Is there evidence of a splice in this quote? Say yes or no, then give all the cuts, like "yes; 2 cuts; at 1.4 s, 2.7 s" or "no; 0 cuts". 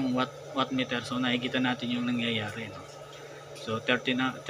no; 0 cuts